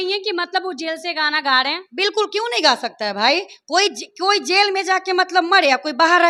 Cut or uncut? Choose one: uncut